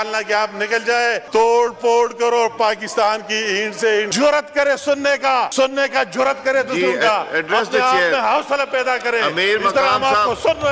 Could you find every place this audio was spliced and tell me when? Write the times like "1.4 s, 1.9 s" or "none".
1.2 s, 4.1 s, 5.5 s